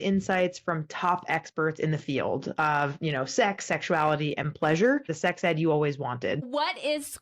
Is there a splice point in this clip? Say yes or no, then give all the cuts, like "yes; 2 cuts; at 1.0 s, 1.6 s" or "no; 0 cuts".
yes; 2 cuts; at 5.1 s, 6.4 s